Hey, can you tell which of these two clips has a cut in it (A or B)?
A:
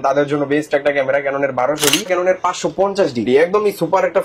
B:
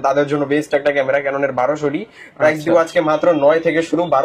A